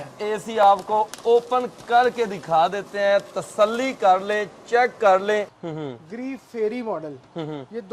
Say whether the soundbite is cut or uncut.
cut